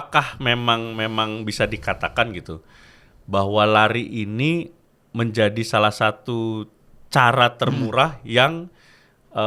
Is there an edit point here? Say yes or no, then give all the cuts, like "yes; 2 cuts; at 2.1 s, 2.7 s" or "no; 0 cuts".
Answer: no; 0 cuts